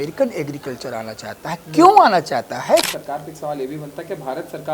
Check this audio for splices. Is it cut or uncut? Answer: cut